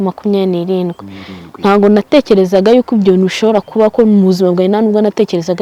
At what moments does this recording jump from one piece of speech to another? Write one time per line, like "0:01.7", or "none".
none